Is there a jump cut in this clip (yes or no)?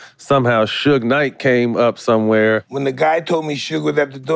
yes